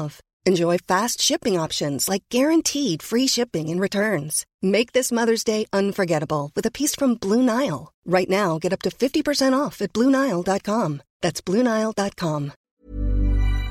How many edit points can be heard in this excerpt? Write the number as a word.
one